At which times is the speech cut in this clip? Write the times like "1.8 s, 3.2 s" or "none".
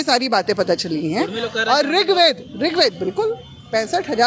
none